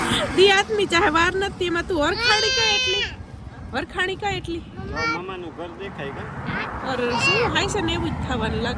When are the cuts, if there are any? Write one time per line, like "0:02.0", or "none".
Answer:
none